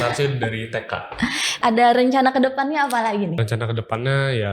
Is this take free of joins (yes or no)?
no